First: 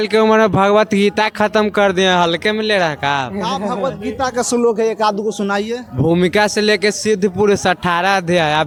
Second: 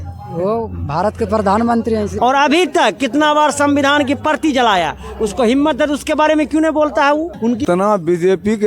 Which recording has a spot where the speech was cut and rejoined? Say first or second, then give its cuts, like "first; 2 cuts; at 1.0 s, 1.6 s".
second; 2 cuts; at 2.1 s, 7.6 s